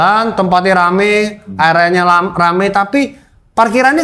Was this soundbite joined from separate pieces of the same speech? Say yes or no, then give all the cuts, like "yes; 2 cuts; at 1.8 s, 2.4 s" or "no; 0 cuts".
no; 0 cuts